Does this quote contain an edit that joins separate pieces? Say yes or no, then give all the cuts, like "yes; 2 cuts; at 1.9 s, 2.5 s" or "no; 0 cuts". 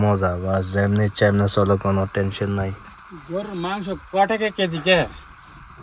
no; 0 cuts